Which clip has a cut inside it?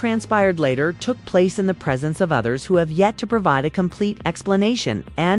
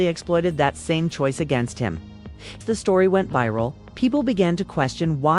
second; 2 cuts; at 1.1 s, 2.6 s

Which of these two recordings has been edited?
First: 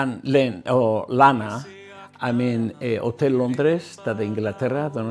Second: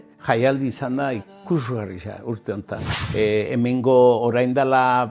second; 1 cut; at 2.9 s

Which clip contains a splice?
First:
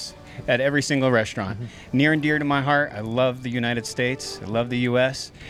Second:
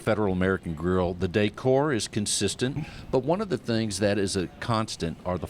second; 1 cut; at 2.8 s

